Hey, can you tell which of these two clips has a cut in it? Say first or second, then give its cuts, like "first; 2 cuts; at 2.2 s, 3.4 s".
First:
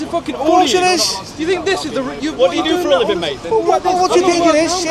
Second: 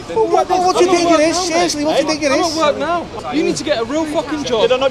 second; 1 cut; at 3.1 s